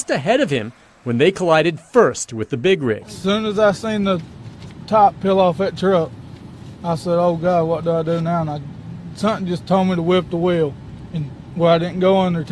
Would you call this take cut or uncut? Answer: cut